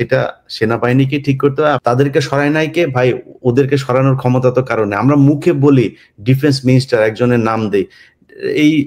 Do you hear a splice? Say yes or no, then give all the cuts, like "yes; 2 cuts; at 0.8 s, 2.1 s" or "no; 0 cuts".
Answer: yes; 1 cut; at 1.8 s